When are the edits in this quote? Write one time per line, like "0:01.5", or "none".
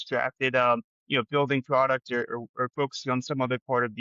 none